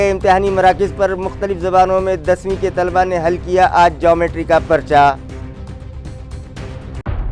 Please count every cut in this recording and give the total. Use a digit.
0